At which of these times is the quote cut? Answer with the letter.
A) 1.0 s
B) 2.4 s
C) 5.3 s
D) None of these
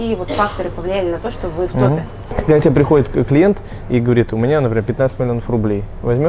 B